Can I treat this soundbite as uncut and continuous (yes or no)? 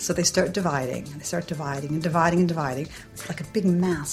yes